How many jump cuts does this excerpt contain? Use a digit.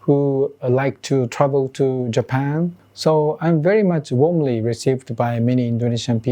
1